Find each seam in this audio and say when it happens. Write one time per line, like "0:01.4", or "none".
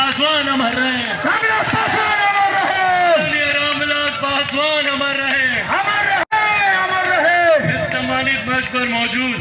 none